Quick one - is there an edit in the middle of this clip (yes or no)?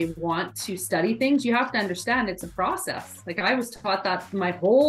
no